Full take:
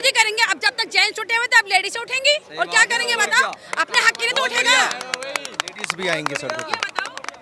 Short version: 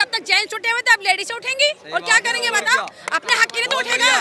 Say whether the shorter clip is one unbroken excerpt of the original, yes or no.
yes